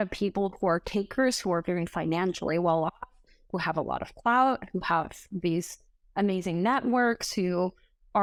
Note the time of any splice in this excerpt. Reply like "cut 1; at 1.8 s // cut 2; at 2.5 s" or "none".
none